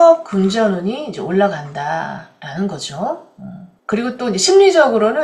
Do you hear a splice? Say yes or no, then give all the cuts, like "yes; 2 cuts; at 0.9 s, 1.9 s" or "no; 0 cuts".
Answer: no; 0 cuts